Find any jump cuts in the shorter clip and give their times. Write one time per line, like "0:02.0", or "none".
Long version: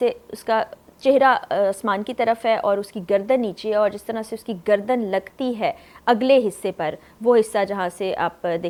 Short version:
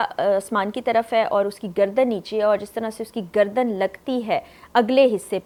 none